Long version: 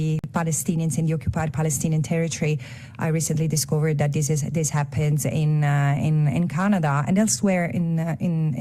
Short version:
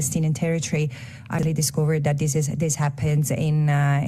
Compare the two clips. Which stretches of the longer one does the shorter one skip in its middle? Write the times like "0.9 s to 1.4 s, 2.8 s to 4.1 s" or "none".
3.1 s to 3.4 s